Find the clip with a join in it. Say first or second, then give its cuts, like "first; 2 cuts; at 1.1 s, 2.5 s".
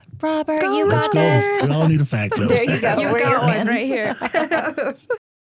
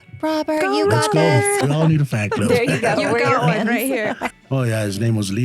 second; 1 cut; at 4.3 s